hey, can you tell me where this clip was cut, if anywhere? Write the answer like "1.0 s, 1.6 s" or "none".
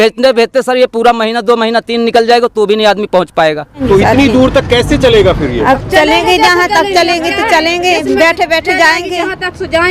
3.8 s